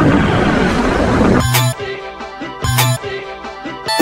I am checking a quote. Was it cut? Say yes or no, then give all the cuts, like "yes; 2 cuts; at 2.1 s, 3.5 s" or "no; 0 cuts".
no; 0 cuts